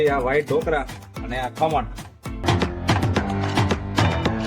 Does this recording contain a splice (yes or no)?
yes